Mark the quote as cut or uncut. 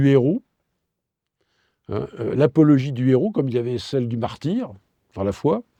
uncut